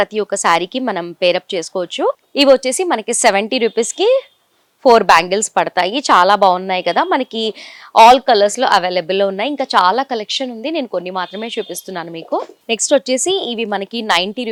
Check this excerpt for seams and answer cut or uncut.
uncut